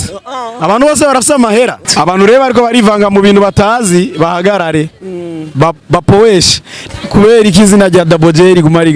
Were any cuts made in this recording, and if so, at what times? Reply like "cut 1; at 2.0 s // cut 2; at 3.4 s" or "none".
cut 1; at 1.9 s // cut 2; at 6.9 s